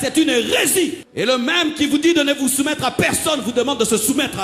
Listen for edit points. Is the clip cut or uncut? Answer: cut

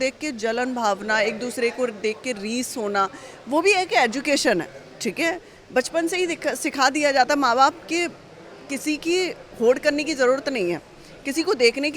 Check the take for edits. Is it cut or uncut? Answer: uncut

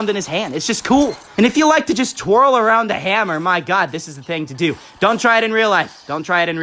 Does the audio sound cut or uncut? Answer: cut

